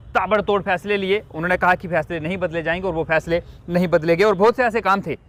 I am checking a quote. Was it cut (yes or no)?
no